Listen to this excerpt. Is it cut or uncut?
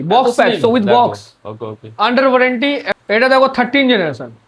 cut